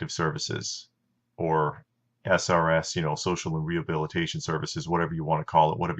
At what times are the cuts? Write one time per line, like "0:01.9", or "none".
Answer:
0:02.9